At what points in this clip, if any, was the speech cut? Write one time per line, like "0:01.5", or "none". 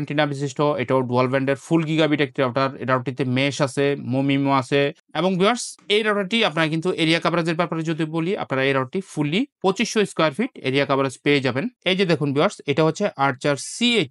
0:11.8